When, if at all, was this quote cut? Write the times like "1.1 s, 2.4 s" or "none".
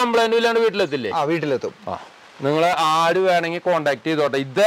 none